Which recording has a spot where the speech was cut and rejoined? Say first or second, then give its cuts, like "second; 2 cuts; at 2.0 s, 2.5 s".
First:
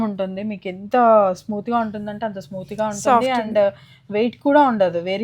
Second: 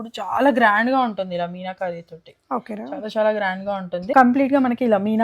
second; 1 cut; at 4.1 s